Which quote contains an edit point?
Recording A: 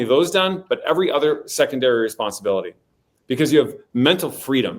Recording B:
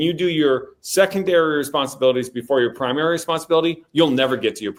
A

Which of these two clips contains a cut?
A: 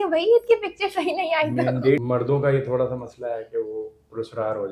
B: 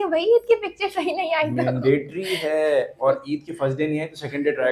A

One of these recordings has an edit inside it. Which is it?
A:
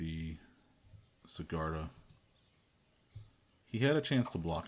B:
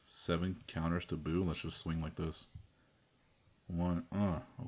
A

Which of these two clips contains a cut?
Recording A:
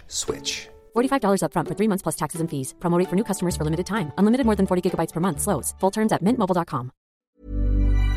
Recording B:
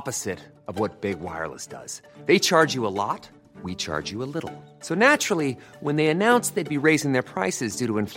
A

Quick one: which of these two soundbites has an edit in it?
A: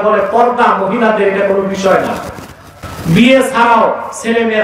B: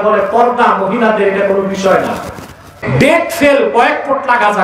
B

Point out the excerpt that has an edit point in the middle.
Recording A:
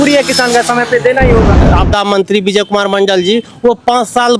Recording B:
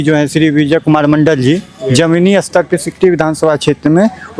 A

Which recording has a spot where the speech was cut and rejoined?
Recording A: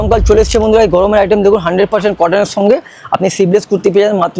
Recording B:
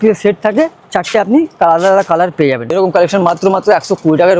B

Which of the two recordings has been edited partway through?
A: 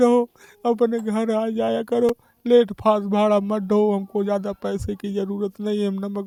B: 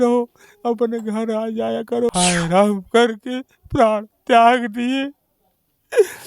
B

